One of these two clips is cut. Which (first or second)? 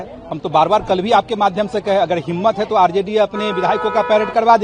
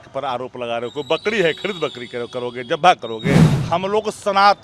second